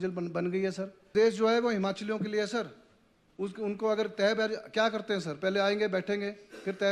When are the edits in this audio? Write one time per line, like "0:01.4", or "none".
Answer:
0:00.9